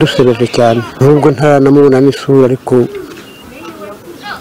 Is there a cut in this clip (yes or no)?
yes